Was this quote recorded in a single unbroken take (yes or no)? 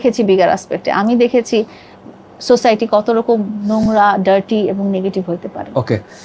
yes